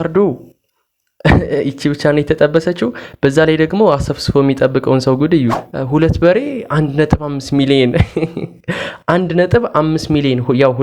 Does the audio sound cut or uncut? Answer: cut